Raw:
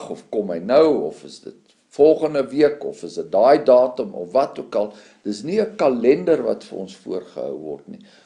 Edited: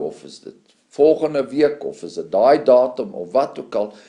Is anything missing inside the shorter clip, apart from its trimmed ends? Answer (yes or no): no